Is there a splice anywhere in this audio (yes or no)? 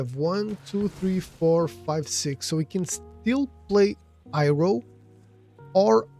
no